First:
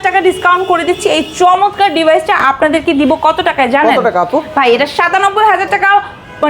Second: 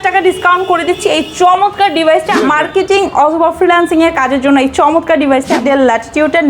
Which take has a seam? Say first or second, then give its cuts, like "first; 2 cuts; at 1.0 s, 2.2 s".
second; 2 cuts; at 2.4 s, 5.6 s